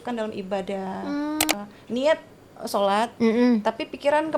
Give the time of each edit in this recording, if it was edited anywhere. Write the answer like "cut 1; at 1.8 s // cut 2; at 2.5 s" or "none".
cut 1; at 1.5 s

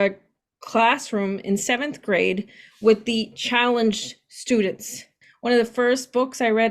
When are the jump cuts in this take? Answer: cut 1; at 5.2 s

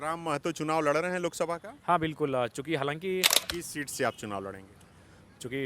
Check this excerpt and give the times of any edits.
cut 1; at 3.4 s

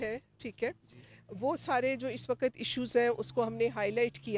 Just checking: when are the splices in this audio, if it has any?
none

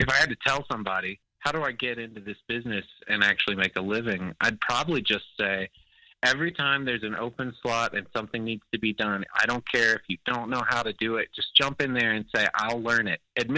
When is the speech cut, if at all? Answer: cut 1; at 1.2 s

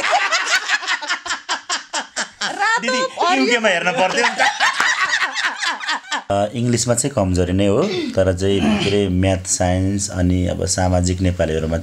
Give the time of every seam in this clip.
cut 1; at 6.3 s

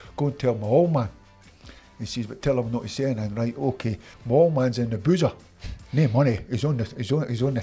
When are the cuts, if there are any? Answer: cut 1; at 4.1 s

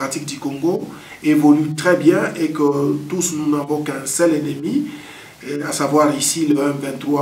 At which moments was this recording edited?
none

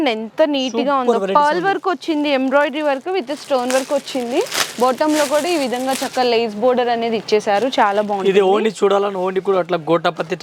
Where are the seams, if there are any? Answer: none

